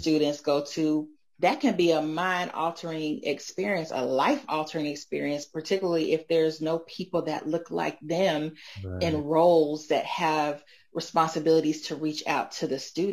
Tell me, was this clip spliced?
no; 0 cuts

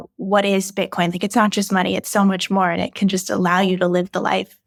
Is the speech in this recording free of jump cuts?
yes; 0 cuts

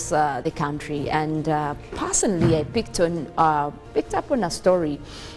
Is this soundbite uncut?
no; 1 cut; at 3.8 s

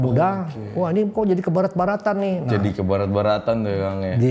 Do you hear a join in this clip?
no; 0 cuts

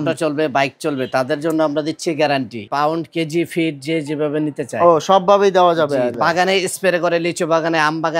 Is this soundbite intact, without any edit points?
no; 2 cuts; at 2.6 s, 6.2 s

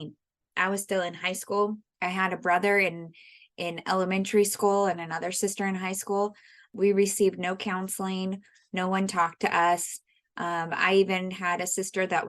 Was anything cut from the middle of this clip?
yes; 2 cuts; at 1.9 s, 6.7 s

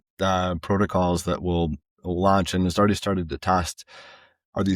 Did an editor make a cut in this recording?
no; 0 cuts

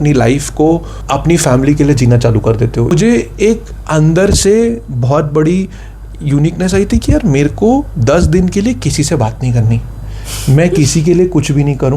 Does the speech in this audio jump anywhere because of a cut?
yes; 2 cuts; at 0.9 s, 2.9 s

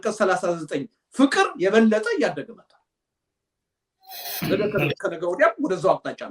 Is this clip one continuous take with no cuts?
yes; 0 cuts

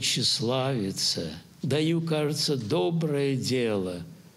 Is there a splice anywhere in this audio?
yes; 1 cut; at 1.4 s

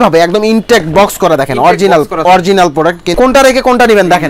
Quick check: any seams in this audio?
yes; 1 cut; at 3.1 s

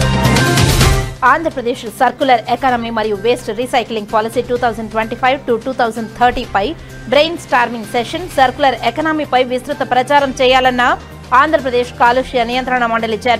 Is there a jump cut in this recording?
yes; 1 cut; at 1.1 s

